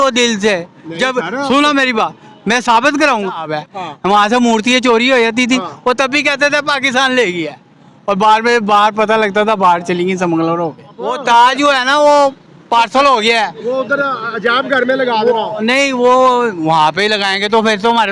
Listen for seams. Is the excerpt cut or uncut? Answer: cut